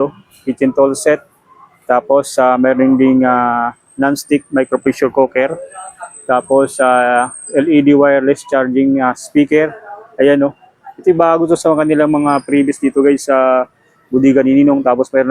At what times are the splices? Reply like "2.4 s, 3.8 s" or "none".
none

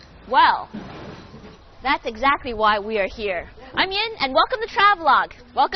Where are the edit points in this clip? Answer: none

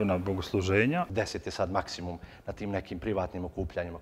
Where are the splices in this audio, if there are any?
1.1 s

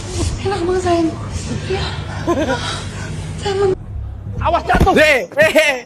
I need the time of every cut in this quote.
3.8 s

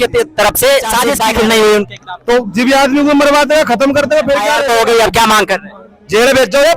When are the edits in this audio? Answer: 1.1 s, 4.5 s

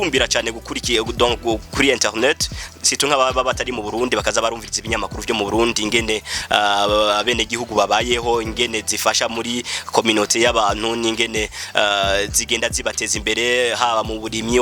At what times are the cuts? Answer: none

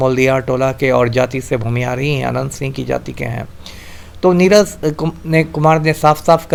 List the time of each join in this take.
none

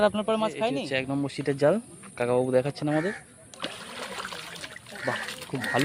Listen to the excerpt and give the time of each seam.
0.9 s

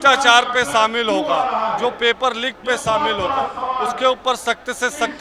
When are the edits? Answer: none

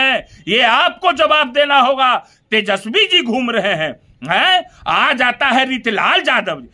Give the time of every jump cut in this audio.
none

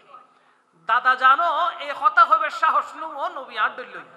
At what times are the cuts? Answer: none

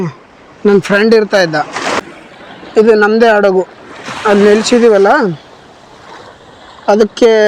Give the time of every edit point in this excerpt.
2.0 s

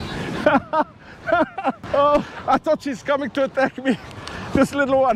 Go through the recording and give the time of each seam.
1.8 s, 2.3 s

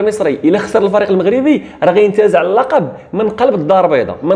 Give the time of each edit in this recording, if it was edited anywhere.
none

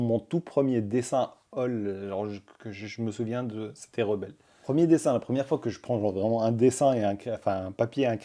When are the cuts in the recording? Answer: 4.6 s

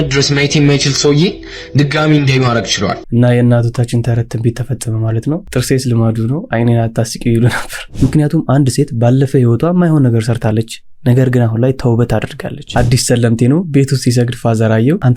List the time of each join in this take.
3.0 s, 7.9 s, 12.7 s

